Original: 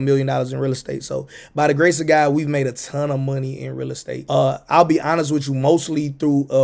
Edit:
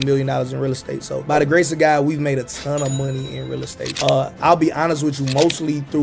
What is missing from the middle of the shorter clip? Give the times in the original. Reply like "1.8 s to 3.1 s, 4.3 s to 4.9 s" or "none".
1.1 s to 1.4 s